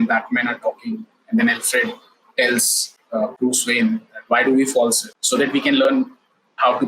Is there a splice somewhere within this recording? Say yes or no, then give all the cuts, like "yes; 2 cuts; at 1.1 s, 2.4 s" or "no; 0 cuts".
yes; 1 cut; at 5.1 s